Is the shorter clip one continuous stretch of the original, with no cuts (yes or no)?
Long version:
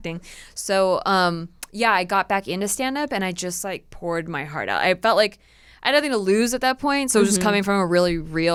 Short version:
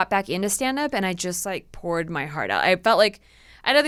yes